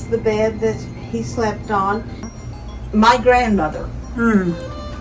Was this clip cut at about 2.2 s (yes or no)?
yes